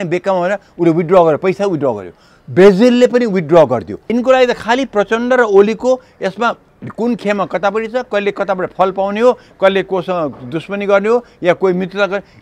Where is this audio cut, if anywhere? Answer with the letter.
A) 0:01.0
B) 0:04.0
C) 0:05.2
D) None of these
B